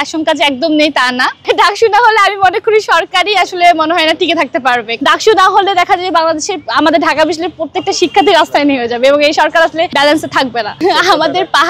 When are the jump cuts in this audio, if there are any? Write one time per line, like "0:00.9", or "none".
0:01.5
0:05.0
0:10.8

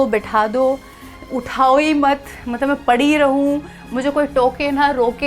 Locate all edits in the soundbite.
none

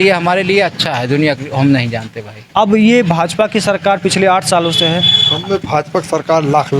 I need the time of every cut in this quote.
0:02.4

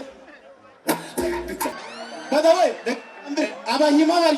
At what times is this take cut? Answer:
0:01.7

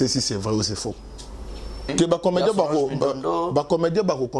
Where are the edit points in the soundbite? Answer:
0:01.9

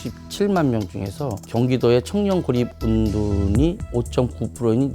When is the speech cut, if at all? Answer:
0:01.4

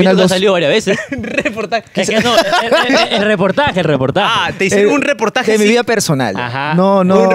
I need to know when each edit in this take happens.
none

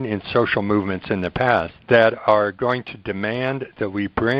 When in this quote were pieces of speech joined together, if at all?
0:01.7

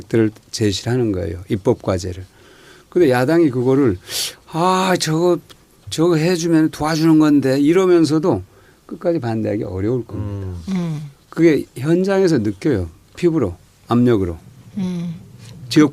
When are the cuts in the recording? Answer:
0:04.7

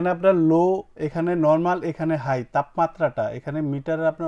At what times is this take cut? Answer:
none

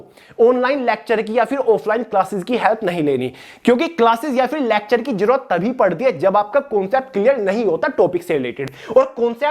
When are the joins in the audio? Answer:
none

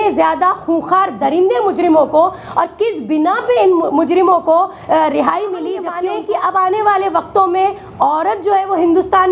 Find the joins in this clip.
0:06.0

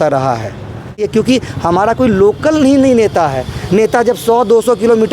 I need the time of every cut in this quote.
0:01.0

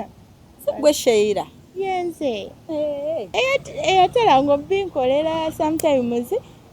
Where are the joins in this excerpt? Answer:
0:03.3

